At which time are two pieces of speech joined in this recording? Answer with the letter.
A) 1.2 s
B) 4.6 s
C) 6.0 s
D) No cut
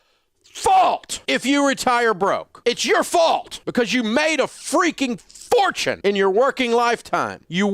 A